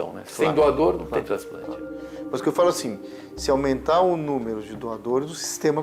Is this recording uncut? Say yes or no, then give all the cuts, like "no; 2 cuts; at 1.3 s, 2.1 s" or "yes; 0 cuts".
yes; 0 cuts